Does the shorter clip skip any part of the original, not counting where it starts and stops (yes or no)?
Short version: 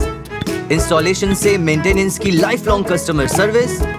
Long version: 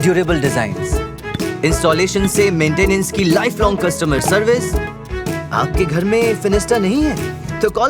no